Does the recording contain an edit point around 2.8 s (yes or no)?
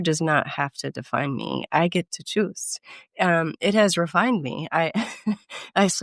no